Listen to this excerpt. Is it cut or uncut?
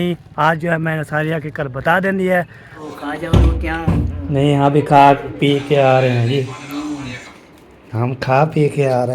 cut